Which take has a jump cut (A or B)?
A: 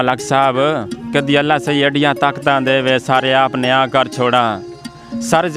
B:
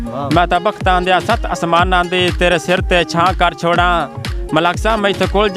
A